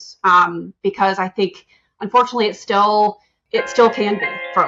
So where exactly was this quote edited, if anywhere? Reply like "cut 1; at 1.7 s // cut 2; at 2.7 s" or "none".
cut 1; at 3.4 s